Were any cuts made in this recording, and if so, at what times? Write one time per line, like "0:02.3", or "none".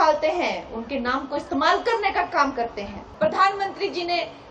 0:03.0